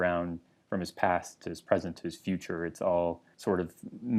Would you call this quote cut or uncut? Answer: cut